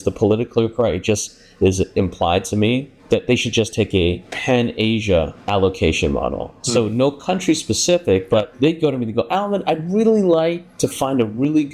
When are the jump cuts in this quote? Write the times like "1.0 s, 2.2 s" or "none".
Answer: 2.9 s, 8.5 s, 10.7 s